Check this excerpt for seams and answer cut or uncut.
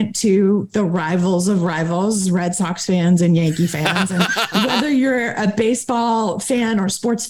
uncut